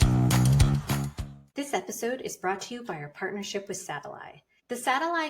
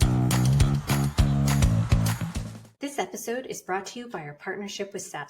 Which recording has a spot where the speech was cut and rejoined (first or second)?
second